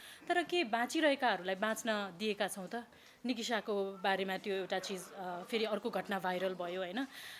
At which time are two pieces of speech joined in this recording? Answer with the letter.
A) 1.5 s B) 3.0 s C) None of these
B